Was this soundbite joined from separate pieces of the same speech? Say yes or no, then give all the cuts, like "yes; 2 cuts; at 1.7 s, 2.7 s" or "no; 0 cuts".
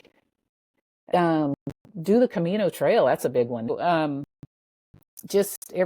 yes; 1 cut; at 3.7 s